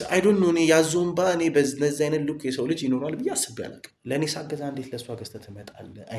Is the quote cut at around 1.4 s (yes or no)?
no